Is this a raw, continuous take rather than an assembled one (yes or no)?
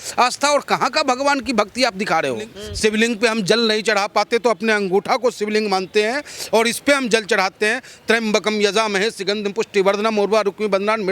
no